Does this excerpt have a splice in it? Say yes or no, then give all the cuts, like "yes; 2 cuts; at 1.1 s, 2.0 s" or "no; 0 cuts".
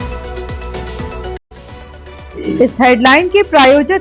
yes; 1 cut; at 1.3 s